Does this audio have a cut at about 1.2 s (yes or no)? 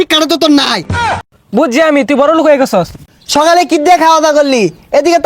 yes